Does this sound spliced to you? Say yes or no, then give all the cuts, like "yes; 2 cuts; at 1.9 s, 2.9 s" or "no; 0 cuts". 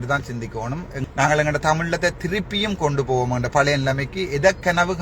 yes; 1 cut; at 0.9 s